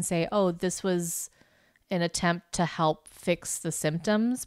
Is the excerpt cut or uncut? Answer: uncut